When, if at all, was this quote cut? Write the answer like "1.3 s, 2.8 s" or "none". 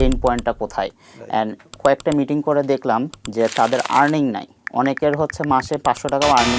1.7 s, 3.1 s